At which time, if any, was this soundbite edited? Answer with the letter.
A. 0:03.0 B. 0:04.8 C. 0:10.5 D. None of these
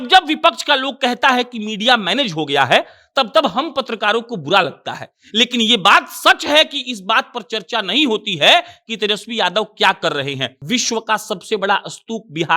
C